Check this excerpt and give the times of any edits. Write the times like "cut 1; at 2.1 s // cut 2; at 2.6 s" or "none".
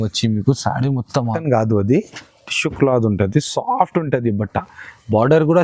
cut 1; at 1.4 s